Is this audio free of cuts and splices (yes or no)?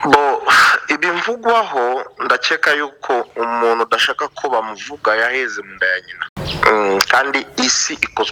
yes